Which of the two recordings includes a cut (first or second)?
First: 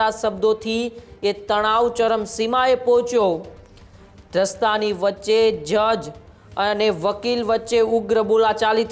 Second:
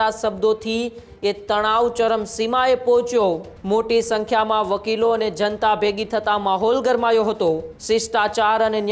second